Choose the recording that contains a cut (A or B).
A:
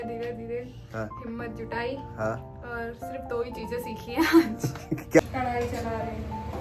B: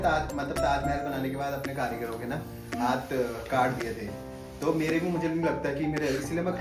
A